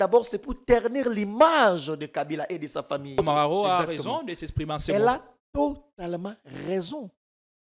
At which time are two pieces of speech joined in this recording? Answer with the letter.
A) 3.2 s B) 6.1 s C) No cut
A